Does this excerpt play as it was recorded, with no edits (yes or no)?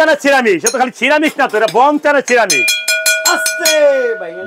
yes